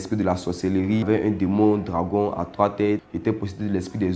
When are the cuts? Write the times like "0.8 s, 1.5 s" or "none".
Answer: 1.0 s, 3.1 s